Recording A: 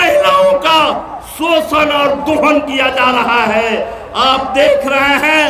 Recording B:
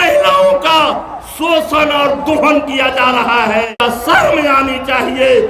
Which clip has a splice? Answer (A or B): B